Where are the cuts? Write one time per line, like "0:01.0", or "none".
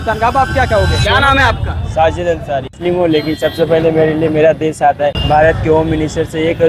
0:01.0
0:02.7
0:05.2